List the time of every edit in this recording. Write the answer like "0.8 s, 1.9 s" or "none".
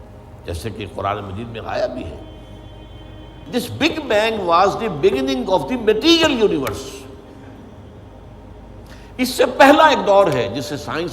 3.5 s